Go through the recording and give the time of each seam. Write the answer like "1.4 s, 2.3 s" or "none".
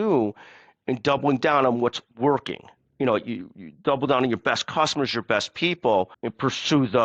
6.1 s